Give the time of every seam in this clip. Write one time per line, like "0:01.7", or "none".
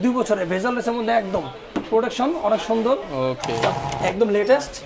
0:03.7